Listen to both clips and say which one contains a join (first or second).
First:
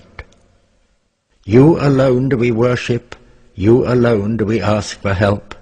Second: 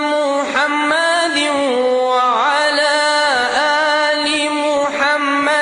first